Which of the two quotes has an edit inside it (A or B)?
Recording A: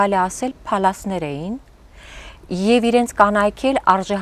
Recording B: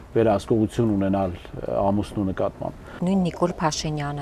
B